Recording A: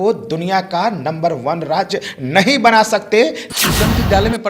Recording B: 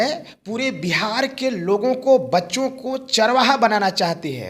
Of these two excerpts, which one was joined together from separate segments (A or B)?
A